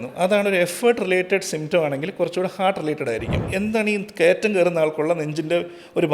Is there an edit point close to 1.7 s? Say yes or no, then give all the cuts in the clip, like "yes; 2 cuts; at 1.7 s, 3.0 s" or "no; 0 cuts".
no; 1 cut; at 3.4 s